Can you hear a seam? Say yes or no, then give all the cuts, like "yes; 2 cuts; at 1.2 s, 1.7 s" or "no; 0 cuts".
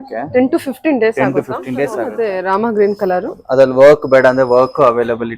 yes; 1 cut; at 2.1 s